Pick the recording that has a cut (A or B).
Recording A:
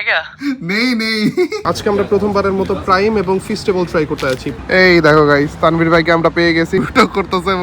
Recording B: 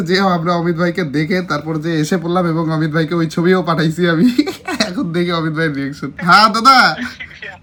A